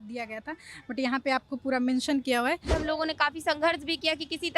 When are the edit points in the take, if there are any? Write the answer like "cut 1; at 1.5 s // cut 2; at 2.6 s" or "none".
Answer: cut 1; at 2.7 s